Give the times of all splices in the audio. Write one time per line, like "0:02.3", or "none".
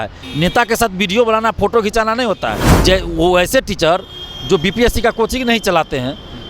0:02.7

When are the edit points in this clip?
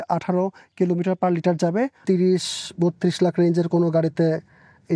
0:02.0

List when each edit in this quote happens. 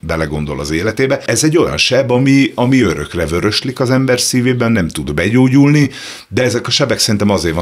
0:01.2

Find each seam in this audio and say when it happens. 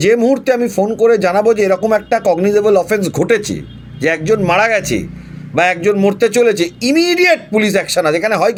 none

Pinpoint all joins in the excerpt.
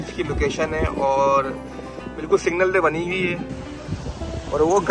0:03.4

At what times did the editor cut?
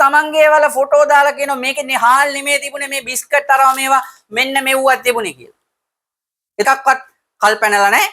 0:06.6

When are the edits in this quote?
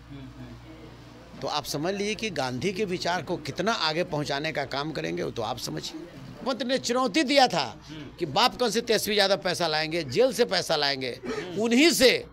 0:06.4

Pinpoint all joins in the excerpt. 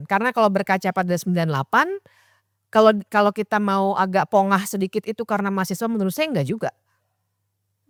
none

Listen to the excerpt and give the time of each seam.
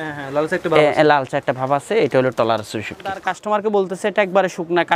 0:03.3

